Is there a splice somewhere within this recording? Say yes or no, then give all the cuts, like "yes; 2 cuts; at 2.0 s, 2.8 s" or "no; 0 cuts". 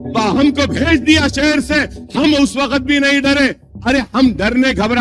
no; 0 cuts